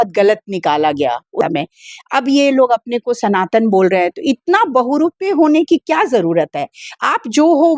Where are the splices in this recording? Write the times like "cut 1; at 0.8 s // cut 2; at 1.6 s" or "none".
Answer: cut 1; at 1.4 s